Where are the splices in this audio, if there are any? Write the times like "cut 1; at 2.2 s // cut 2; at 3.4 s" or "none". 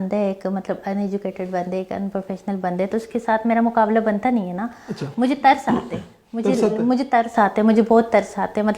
none